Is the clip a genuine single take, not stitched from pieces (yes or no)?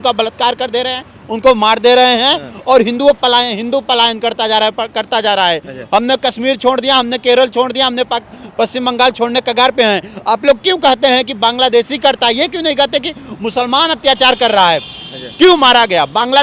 yes